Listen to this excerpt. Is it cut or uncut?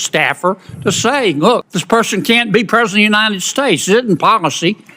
cut